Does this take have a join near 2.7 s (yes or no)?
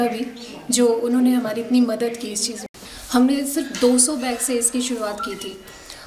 yes